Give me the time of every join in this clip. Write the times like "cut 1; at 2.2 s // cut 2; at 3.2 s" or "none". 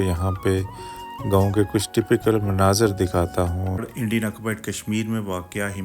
cut 1; at 3.8 s